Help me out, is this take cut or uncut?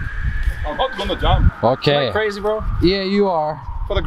cut